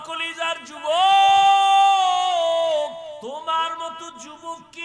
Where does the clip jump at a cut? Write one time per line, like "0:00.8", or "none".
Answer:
0:03.2